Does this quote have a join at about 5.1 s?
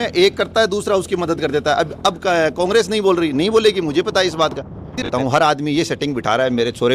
yes; 1 cut; at 5.1 s

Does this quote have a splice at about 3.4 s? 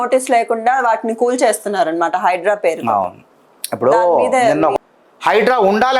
no; 1 cut; at 4.8 s

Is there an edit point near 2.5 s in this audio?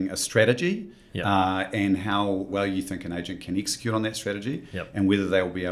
yes; 1 cut; at 2.5 s

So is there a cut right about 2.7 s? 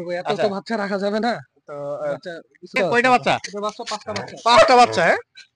yes; 1 cut; at 2.7 s

